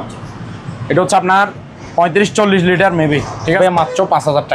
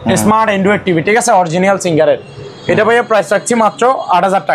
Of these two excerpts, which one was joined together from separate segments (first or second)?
first